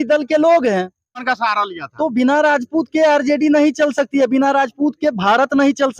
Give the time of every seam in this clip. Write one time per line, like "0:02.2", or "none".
0:01.3